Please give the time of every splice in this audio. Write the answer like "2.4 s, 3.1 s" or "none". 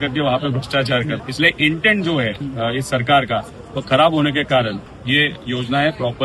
1.2 s, 2.4 s, 4.9 s